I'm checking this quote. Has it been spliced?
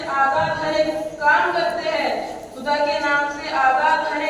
no; 0 cuts

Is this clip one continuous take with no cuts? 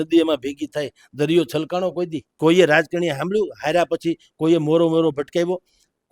no; 1 cut; at 2.2 s

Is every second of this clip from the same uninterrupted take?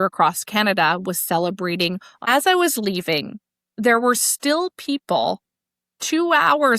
no; 1 cut; at 2.2 s

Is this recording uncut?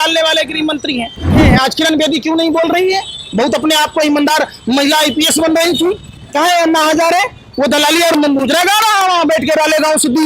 no; 1 cut; at 1.4 s

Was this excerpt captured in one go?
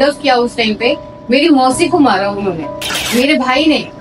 no; 1 cut; at 2.9 s

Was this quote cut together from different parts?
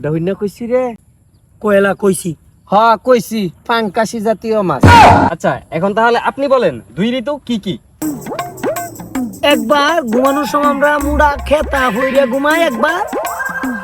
yes; 2 cuts; at 4.8 s, 5.4 s

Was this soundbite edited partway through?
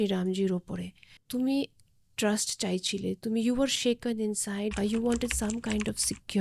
yes; 2 cuts; at 1.2 s, 4.7 s

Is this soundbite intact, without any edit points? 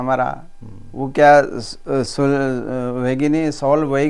yes; 0 cuts

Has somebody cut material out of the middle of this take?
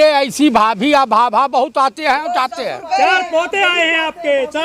no; 0 cuts

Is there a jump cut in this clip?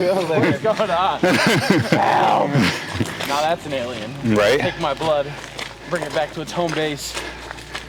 no; 0 cuts

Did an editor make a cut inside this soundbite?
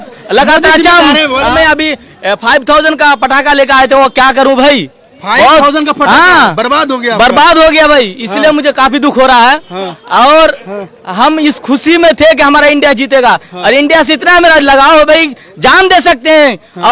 yes; 1 cut; at 1.5 s

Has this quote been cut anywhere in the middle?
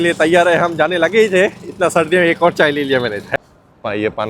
yes; 1 cut; at 3.4 s

